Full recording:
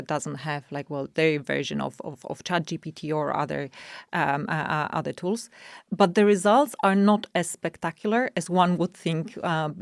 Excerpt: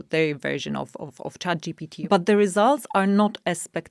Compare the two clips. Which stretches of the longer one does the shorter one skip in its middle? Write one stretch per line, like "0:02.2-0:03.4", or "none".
0:02.9-0:05.8